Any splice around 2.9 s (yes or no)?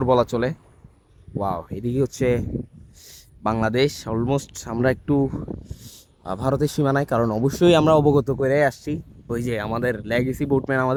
no